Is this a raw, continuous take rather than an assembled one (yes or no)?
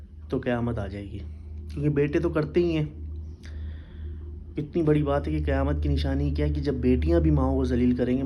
yes